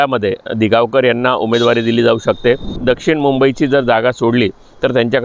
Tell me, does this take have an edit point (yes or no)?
yes